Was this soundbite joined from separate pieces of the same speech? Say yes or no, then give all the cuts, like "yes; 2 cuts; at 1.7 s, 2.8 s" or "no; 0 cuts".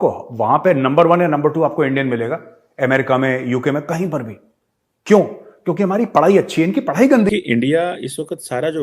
yes; 1 cut; at 7.3 s